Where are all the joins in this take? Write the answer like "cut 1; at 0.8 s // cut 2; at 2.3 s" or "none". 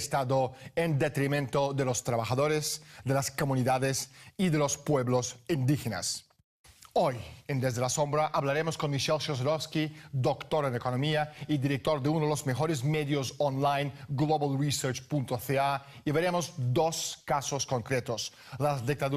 cut 1; at 12.1 s